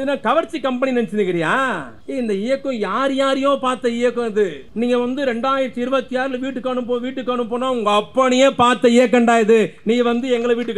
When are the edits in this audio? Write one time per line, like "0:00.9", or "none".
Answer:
0:01.9
0:04.6